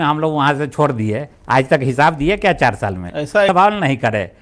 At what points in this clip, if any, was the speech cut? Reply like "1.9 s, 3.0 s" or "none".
3.5 s